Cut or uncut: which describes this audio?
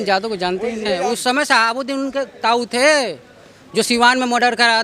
cut